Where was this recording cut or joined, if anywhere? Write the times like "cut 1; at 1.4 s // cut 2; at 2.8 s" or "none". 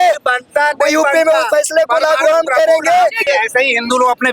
cut 1; at 3.3 s

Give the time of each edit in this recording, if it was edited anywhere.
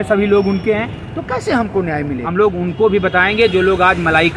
cut 1; at 2.2 s

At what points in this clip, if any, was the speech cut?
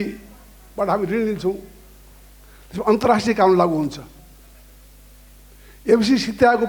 none

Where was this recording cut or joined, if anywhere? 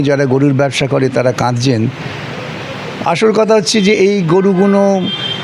none

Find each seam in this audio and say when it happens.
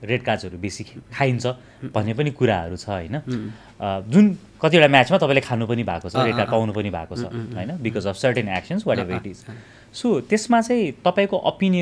none

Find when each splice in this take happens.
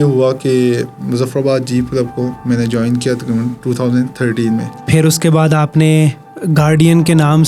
cut 1; at 4.7 s

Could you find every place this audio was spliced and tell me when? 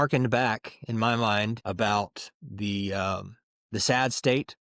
cut 1; at 1.6 s

